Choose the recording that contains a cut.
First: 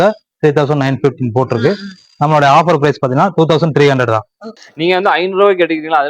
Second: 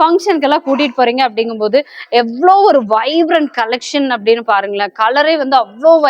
first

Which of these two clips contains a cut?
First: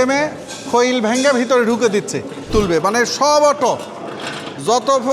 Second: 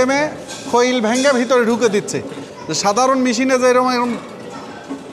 first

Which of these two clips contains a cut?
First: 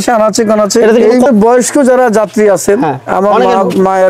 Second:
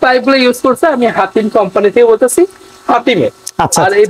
first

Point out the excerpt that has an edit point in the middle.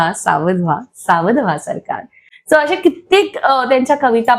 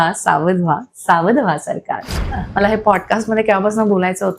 second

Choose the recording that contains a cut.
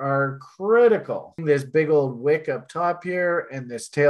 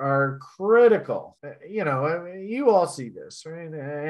first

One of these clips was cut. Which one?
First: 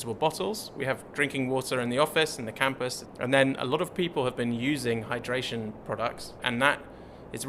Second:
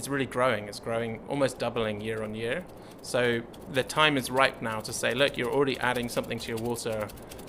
first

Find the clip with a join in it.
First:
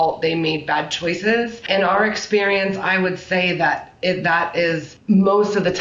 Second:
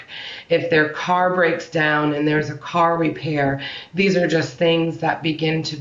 first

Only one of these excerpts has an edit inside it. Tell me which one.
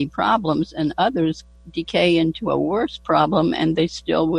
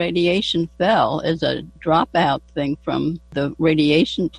second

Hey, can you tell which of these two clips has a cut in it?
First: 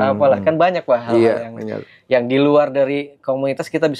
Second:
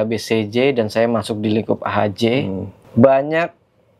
second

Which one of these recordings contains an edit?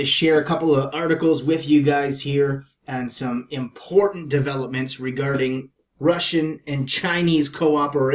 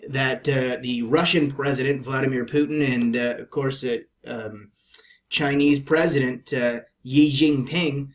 second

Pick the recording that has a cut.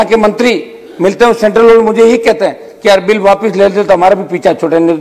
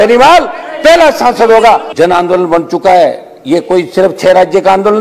second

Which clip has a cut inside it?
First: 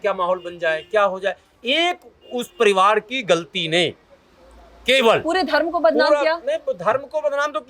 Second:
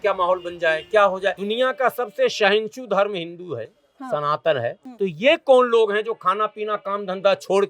second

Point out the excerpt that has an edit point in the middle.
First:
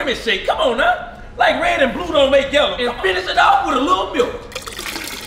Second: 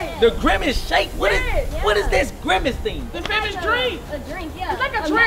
first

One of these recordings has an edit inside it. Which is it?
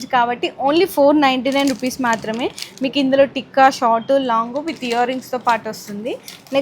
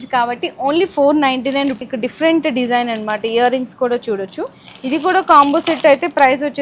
second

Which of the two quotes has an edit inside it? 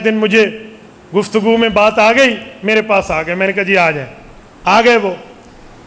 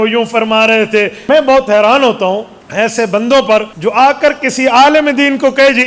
second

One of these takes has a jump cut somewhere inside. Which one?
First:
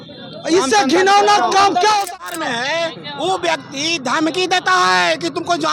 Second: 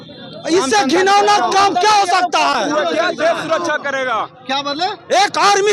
first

